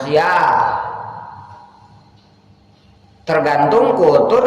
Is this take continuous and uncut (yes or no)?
no